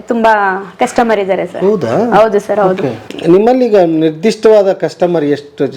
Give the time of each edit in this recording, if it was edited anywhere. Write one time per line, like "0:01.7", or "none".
0:03.0